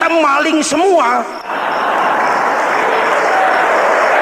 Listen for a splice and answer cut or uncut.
cut